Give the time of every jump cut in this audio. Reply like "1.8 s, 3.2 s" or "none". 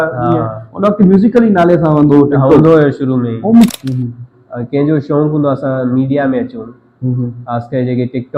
3.7 s